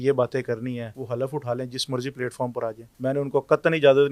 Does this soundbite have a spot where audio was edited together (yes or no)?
yes